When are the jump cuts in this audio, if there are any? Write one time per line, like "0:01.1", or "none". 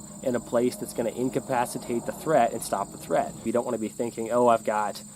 0:03.4